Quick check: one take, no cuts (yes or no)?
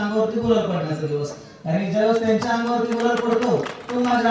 yes